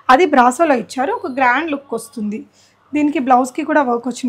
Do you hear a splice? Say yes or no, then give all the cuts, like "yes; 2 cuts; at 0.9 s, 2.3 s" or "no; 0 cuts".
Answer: no; 0 cuts